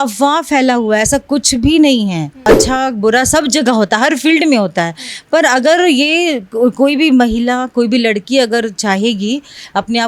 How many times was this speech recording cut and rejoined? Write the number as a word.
one